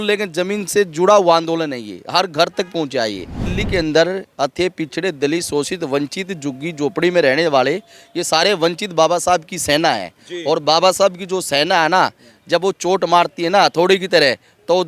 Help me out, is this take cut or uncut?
cut